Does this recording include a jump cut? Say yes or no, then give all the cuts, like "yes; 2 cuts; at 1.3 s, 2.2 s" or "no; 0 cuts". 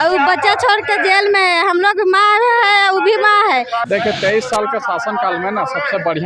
yes; 1 cut; at 3.8 s